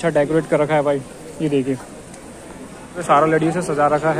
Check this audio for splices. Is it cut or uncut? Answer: cut